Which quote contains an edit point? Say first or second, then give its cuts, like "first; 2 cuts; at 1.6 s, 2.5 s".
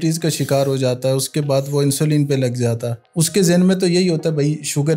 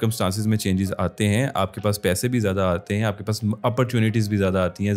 first; 1 cut; at 3.0 s